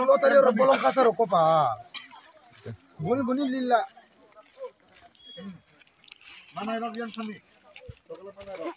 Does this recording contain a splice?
no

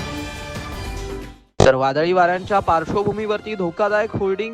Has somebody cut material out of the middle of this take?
yes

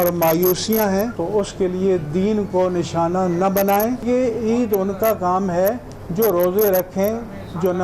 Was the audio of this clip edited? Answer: yes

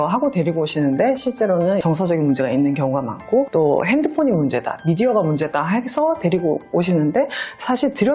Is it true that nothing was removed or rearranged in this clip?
no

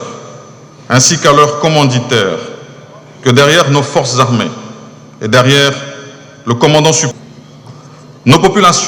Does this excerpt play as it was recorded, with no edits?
no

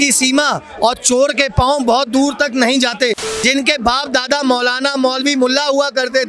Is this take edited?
yes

